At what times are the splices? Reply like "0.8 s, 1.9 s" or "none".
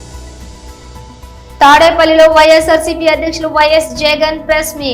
1.2 s